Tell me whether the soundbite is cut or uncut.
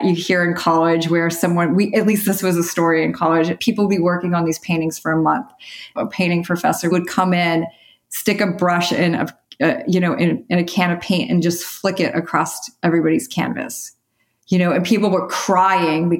cut